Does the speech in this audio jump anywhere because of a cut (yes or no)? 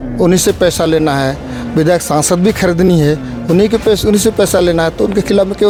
no